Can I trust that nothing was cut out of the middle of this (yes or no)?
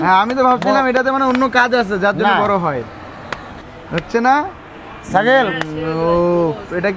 yes